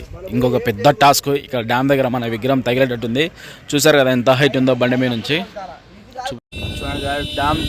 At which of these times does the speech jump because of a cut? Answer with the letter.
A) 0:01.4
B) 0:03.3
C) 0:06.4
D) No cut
C